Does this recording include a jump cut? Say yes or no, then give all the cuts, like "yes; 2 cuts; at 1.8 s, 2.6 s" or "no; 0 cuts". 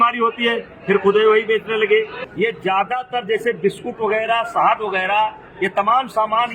no; 0 cuts